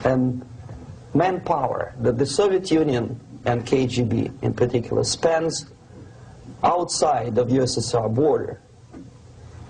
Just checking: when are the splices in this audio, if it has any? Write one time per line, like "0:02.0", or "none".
0:01.7